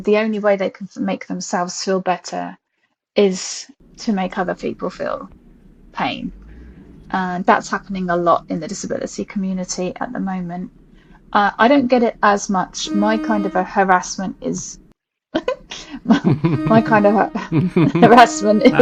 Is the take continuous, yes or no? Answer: yes